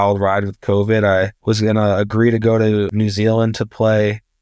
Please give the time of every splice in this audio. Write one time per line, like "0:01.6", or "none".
0:01.3
0:02.9